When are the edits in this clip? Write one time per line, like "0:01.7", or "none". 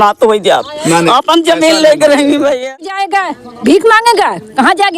0:02.9